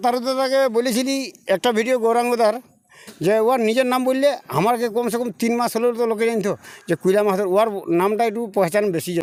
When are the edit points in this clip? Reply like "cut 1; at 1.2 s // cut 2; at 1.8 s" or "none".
none